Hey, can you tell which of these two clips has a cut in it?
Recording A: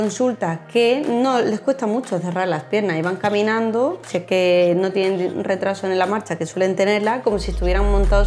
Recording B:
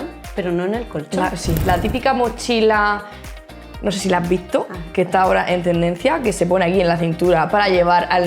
B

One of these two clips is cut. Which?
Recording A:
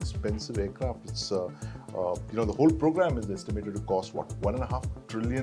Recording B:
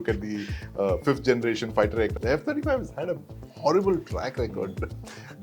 B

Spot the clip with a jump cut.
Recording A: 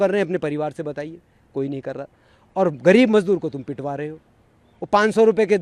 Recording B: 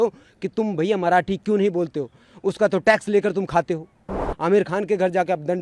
B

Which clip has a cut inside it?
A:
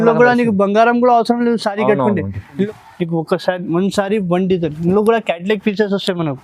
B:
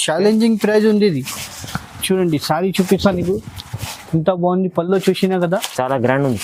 A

